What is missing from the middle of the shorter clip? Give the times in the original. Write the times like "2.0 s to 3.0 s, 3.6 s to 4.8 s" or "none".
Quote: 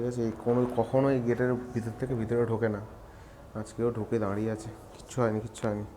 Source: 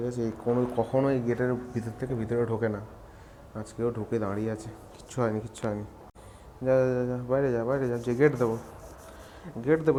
none

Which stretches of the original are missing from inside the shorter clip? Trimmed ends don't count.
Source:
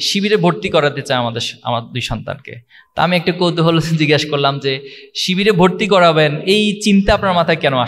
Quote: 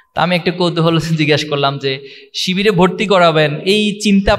none

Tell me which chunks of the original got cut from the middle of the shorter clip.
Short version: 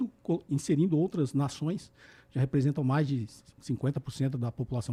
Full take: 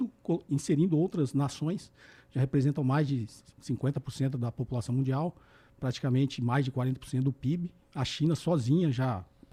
none

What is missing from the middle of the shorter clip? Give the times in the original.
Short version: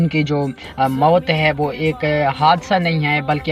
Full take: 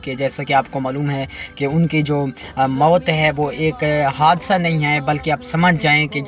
none

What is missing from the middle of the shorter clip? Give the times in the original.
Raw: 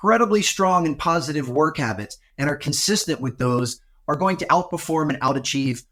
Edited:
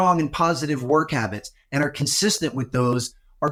none

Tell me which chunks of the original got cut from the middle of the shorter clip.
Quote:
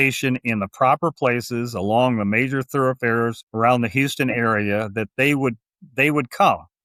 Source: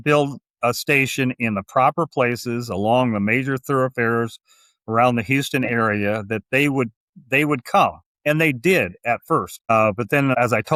4.4 s to 4.8 s

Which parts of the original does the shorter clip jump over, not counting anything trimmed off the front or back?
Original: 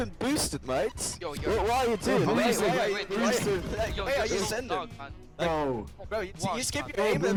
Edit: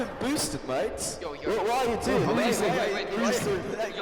none

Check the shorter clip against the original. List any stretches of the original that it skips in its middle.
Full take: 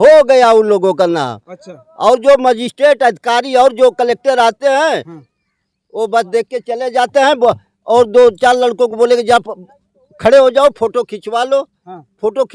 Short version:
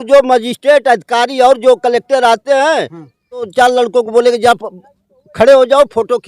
5.7 s to 8.4 s

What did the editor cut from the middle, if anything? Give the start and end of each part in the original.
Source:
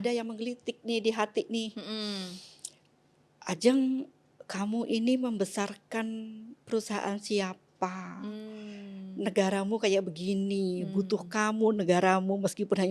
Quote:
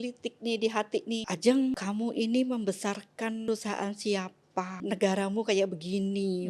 1.7 s to 3.4 s, 4.0 s to 4.5 s, 6.2 s to 6.7 s, 8.0 s to 9.1 s

